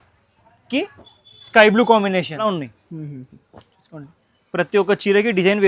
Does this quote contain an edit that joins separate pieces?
yes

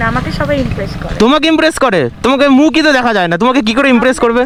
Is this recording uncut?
yes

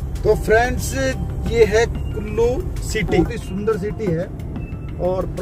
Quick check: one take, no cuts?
no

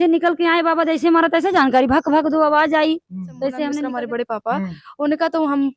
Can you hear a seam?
yes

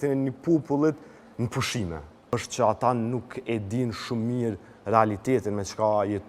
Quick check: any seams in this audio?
yes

